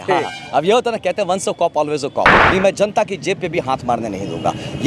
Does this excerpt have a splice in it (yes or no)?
yes